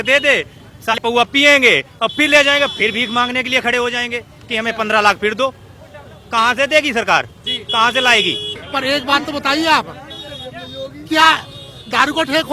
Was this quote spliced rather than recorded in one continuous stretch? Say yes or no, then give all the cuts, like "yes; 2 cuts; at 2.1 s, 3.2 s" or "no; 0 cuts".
yes; 2 cuts; at 1.0 s, 8.5 s